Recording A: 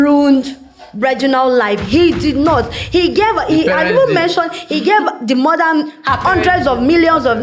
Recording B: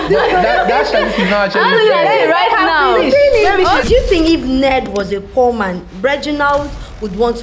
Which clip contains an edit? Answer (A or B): B